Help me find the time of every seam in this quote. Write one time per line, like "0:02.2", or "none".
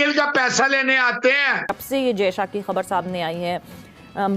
0:01.8